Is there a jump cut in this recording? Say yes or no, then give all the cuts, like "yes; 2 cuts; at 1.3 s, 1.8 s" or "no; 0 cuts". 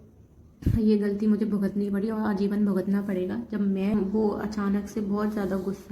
yes; 1 cut; at 3.9 s